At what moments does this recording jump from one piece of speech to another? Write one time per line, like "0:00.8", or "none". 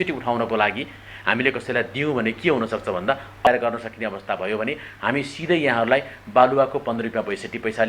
0:03.5